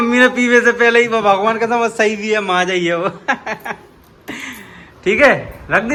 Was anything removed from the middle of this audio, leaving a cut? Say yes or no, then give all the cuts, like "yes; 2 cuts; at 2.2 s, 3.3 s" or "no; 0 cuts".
no; 0 cuts